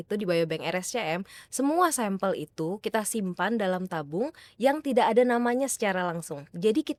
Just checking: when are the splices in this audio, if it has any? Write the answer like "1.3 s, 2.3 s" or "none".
none